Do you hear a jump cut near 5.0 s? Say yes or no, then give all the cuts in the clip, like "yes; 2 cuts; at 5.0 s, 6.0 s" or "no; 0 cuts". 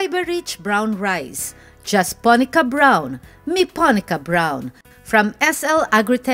no; 0 cuts